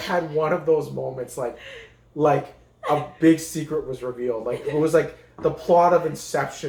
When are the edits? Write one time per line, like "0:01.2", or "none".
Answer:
none